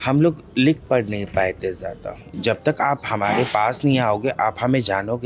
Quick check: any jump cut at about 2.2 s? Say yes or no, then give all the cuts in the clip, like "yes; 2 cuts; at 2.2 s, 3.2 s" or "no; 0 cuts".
yes; 1 cut; at 2.2 s